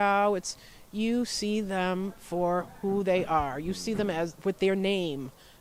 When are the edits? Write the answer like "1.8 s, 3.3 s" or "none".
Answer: none